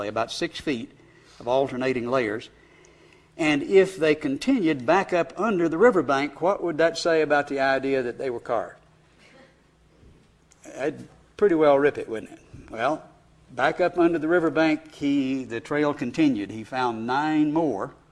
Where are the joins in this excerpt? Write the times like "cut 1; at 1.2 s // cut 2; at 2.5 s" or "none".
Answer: cut 1; at 10.7 s